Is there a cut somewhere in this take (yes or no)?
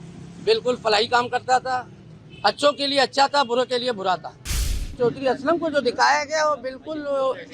yes